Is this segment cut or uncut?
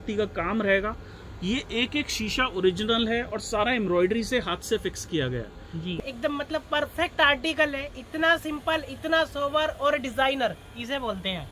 cut